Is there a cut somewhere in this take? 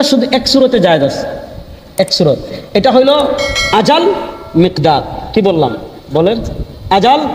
no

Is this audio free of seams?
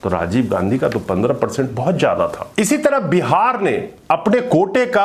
no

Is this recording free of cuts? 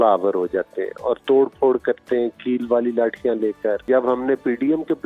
no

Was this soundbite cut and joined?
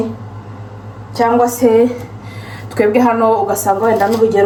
no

